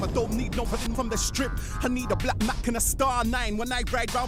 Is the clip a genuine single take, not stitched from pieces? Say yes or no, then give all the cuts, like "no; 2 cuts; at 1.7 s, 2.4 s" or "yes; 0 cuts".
yes; 0 cuts